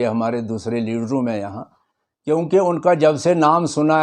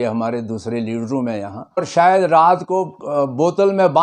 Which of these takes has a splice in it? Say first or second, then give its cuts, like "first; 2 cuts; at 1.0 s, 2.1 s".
second; 1 cut; at 2.1 s